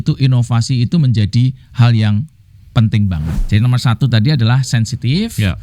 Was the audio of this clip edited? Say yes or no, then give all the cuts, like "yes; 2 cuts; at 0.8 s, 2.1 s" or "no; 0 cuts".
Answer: yes; 1 cut; at 3.4 s